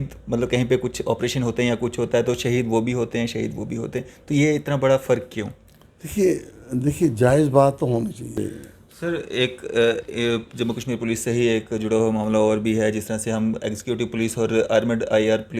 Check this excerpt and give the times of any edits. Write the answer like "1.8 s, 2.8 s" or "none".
8.4 s